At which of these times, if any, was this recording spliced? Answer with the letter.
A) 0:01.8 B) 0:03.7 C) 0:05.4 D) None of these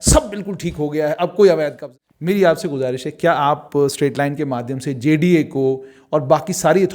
A